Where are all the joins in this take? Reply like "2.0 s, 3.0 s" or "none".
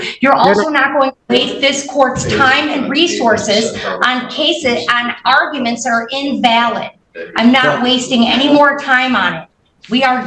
none